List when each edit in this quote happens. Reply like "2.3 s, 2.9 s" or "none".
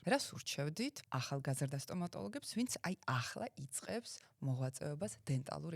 1.0 s